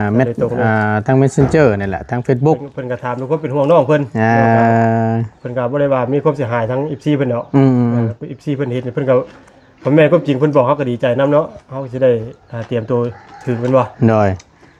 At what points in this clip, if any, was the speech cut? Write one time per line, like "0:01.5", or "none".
none

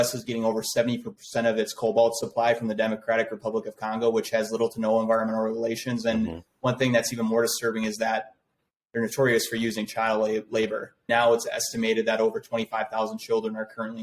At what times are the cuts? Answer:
0:11.1

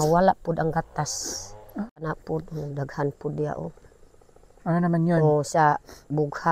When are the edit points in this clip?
0:02.0

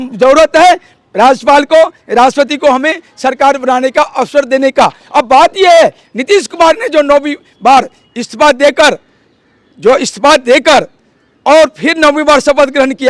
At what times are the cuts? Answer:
none

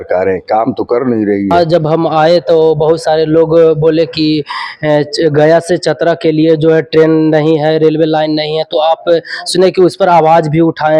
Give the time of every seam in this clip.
0:01.5

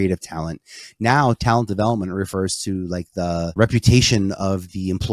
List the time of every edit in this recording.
0:03.5

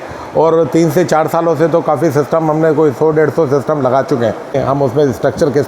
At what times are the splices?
0:04.6

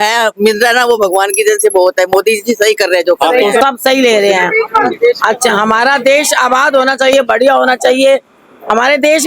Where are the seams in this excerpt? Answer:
0:03.6

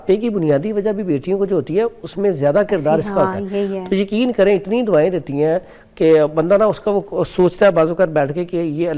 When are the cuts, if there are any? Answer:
none

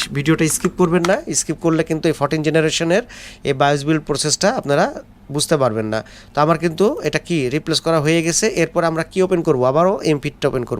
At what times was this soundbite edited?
none

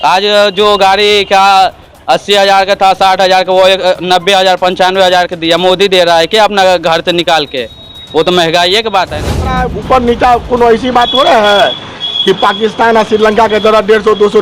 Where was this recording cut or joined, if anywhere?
0:09.5

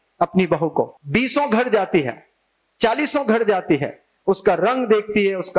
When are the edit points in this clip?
0:00.9

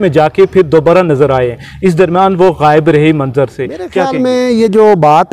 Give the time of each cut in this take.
0:04.0

